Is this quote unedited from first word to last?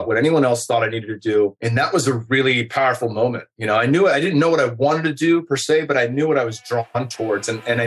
yes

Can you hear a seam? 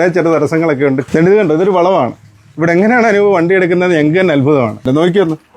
yes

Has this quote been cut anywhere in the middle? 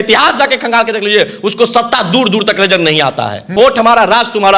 yes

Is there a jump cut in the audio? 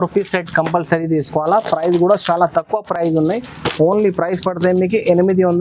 no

